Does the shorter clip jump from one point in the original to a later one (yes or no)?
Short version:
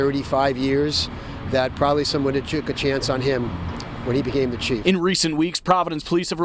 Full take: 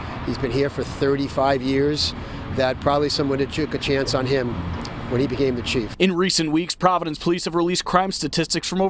yes